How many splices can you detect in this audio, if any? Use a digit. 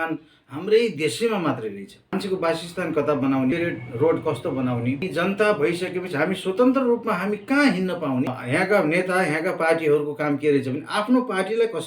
4